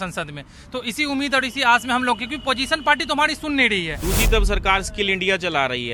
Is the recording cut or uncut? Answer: cut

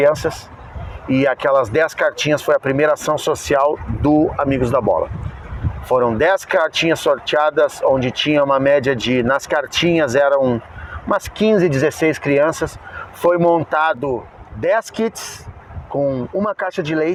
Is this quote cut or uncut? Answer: uncut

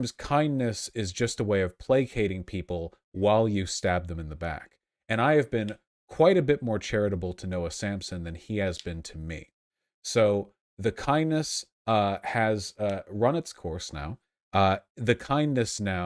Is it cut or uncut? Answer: uncut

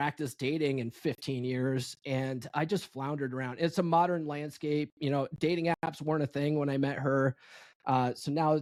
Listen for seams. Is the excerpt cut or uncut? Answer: uncut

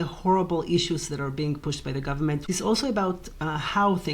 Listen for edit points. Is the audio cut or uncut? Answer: cut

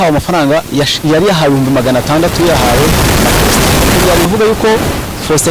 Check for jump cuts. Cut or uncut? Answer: cut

